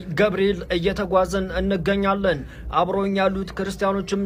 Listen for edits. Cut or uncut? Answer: uncut